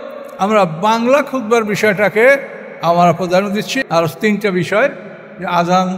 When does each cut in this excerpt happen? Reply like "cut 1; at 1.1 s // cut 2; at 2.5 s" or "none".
cut 1; at 3.7 s

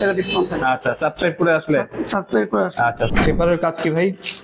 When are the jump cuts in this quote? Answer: cut 1; at 3.1 s

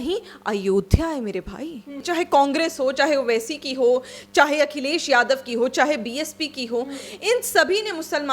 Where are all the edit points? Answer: cut 1; at 1.9 s

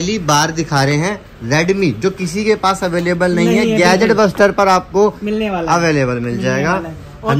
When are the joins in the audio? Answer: none

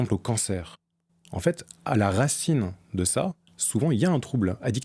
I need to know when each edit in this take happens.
none

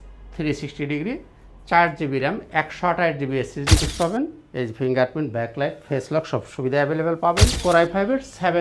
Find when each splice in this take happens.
cut 1; at 3.8 s // cut 2; at 7.6 s

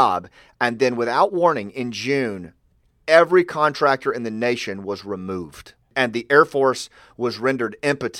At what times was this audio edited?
cut 1; at 1.3 s // cut 2; at 5.9 s

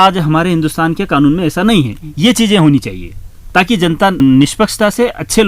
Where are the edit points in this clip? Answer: cut 1; at 4.2 s

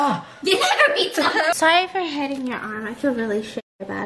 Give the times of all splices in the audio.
cut 1; at 1.5 s

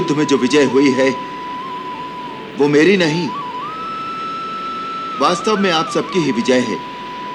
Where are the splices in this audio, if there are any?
none

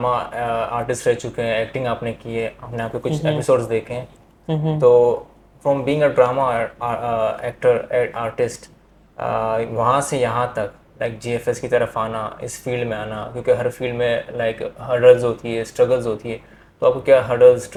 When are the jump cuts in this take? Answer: none

